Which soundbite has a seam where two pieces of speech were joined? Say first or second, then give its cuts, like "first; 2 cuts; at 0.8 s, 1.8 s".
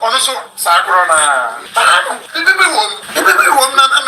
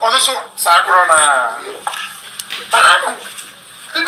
first; 3 cuts; at 1.6 s, 2.3 s, 3.0 s